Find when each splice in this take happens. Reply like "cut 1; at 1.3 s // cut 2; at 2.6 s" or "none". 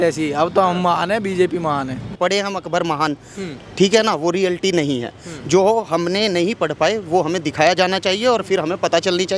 cut 1; at 2.2 s